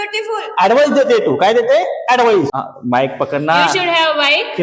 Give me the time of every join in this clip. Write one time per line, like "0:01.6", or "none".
0:02.5